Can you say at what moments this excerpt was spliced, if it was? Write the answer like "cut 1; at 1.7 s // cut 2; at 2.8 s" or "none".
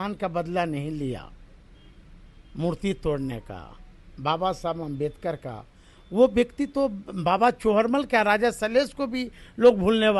none